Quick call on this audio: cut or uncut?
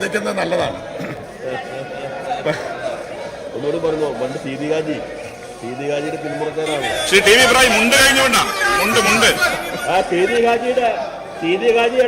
uncut